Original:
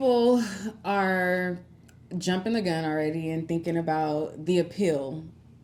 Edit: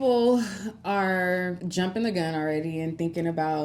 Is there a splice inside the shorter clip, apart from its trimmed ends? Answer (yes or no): yes